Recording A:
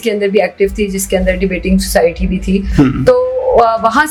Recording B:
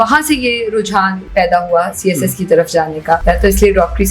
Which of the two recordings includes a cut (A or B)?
B